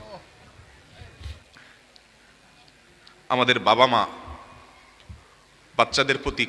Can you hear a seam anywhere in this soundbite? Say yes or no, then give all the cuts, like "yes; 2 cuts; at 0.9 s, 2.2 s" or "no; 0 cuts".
no; 0 cuts